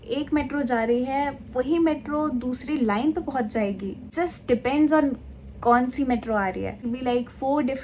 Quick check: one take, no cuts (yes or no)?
no